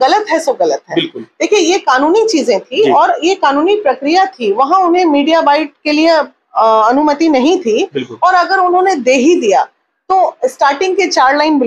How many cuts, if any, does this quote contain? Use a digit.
0